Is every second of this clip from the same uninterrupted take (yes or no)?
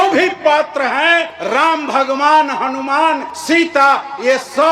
no